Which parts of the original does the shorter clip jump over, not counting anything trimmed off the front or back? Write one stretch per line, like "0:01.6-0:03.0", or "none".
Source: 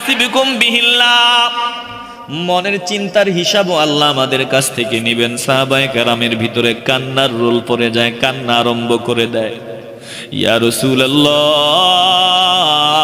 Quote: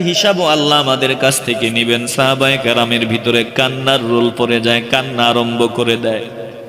none